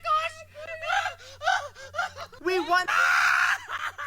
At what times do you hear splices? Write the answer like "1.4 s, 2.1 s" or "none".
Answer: 2.3 s